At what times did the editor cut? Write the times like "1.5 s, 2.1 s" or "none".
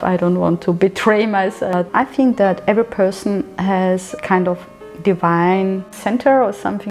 1.7 s